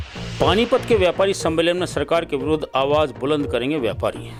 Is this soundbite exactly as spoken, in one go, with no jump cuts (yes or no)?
yes